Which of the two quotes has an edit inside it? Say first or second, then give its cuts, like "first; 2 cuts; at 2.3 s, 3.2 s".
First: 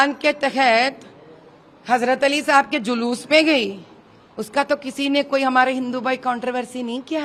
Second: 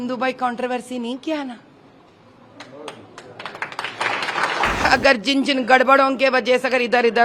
second; 1 cut; at 4.9 s